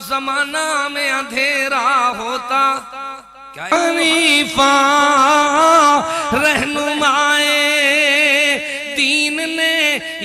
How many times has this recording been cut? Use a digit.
1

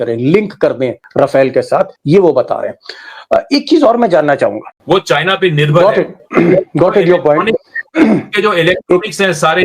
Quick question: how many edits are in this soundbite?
1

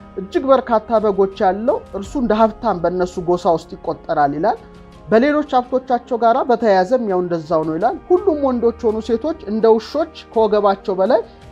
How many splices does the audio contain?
0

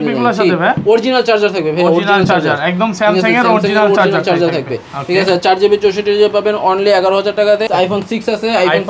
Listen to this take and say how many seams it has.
1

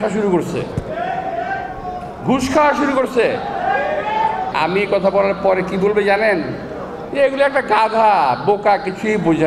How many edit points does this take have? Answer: 1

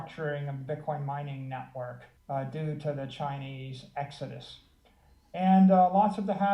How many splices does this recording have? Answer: 1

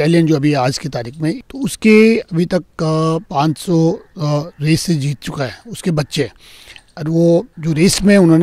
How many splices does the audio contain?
3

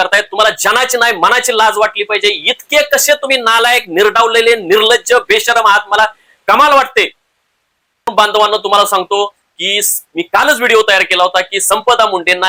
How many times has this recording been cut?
1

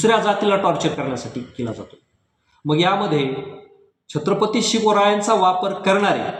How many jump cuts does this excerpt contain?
0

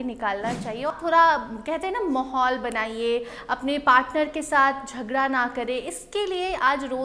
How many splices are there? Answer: 1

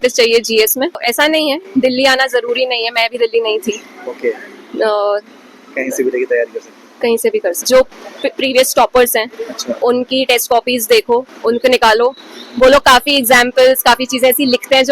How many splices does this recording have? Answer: 2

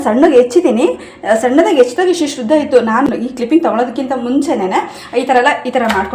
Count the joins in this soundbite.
0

